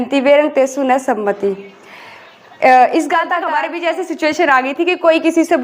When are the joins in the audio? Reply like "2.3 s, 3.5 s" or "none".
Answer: 3.4 s

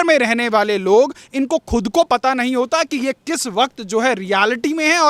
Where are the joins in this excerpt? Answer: none

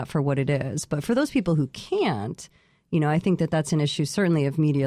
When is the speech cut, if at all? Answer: none

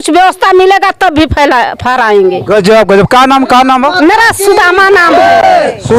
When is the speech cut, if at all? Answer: none

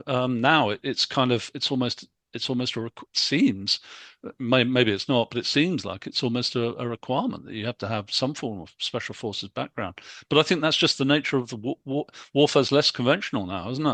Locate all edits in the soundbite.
none

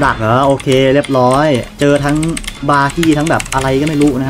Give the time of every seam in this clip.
1.7 s

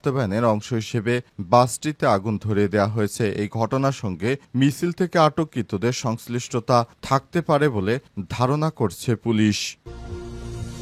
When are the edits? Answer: 9.8 s

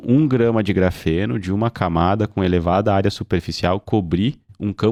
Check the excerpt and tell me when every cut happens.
none

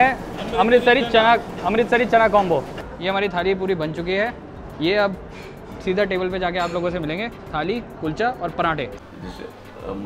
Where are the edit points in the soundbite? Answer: 2.8 s, 9.0 s

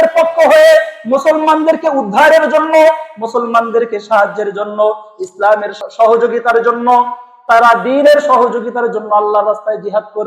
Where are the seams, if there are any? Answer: 5.8 s

